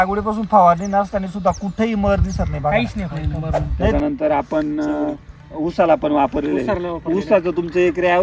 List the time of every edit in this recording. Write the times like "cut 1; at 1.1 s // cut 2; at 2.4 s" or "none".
cut 1; at 3.9 s